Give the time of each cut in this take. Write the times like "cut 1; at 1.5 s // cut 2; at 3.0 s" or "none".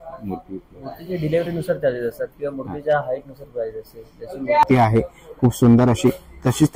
cut 1; at 4.6 s